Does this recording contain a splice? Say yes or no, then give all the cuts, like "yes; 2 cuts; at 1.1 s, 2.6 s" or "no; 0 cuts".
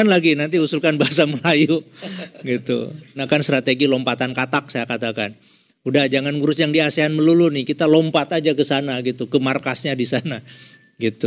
yes; 1 cut; at 3.2 s